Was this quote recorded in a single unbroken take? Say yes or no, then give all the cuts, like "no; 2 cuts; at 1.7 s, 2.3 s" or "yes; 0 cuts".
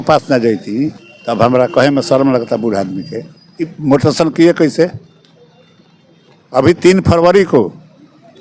yes; 0 cuts